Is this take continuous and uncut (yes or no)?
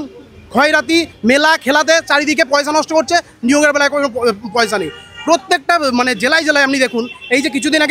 yes